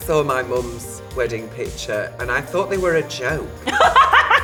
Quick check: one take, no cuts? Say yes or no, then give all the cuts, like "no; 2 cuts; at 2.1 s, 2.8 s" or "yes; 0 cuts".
yes; 0 cuts